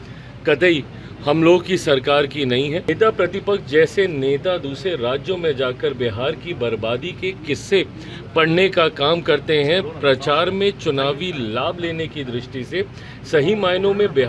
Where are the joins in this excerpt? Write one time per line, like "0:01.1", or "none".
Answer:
0:02.9

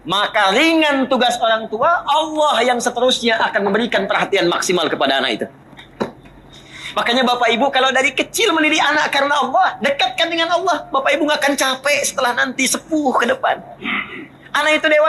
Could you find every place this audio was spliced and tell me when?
none

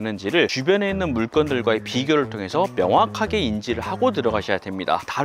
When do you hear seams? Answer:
none

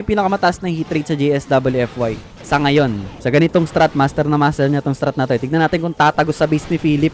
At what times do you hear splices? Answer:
0:02.3
0:03.1

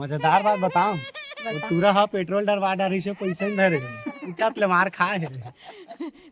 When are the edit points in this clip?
none

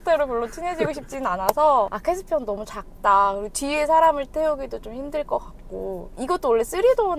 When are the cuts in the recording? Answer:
none

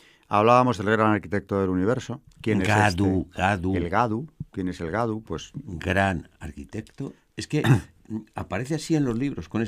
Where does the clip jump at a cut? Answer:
0:04.8

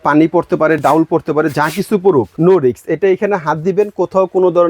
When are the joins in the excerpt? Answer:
0:02.3

